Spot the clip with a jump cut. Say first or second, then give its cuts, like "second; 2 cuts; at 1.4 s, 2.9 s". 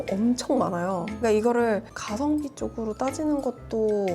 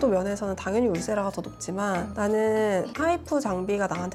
first; 1 cut; at 1.1 s